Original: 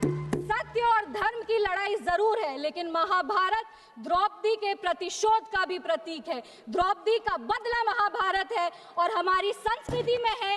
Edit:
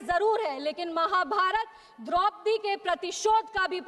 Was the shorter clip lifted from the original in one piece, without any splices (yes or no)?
yes